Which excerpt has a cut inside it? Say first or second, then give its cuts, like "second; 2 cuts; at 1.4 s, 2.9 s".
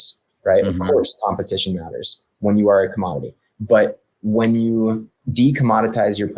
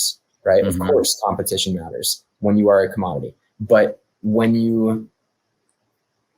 first; 1 cut; at 5.2 s